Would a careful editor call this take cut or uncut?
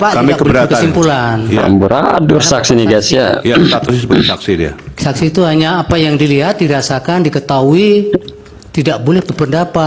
uncut